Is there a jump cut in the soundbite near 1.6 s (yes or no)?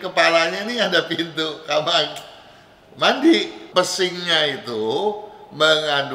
no